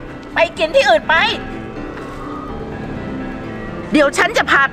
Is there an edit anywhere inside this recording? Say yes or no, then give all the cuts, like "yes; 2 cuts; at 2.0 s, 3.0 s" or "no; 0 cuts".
no; 0 cuts